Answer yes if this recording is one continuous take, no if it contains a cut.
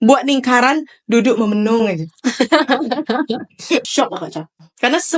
no